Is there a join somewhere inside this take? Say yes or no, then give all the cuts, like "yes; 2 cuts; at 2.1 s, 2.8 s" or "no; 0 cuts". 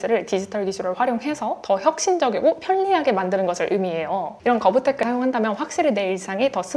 yes; 1 cut; at 4.3 s